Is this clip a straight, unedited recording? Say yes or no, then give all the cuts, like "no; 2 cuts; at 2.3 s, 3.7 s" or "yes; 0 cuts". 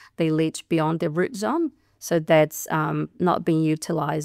yes; 0 cuts